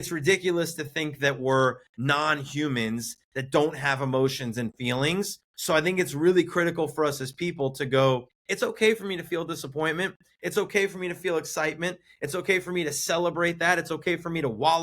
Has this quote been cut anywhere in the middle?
yes; 2 cuts; at 5.5 s, 8.4 s

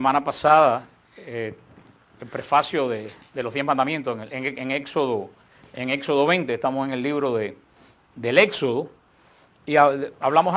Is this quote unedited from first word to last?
yes; 0 cuts

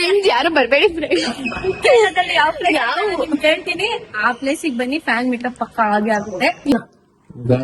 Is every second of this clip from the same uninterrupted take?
no; 2 cuts; at 2.1 s, 6.7 s

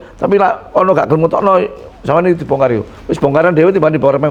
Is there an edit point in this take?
no; 0 cuts

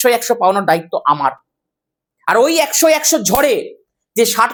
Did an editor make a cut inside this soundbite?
no; 0 cuts

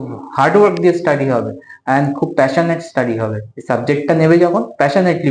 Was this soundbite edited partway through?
no; 0 cuts

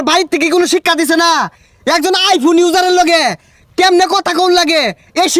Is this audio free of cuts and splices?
yes; 0 cuts

